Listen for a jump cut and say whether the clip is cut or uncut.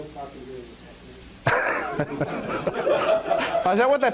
cut